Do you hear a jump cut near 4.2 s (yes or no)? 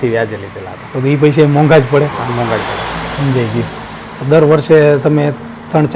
no